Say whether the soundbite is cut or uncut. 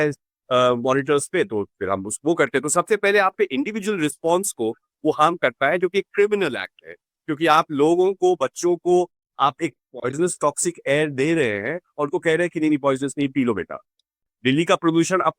cut